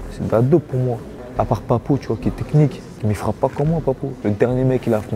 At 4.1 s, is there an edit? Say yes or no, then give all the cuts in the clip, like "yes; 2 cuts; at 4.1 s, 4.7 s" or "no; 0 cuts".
yes; 3 cuts; at 1.2 s, 3.0 s, 4.1 s